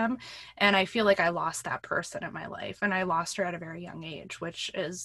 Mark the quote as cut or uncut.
uncut